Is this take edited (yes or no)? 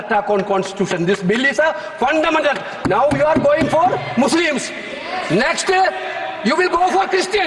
no